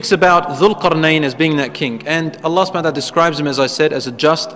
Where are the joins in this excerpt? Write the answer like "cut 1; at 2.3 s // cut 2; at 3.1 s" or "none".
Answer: none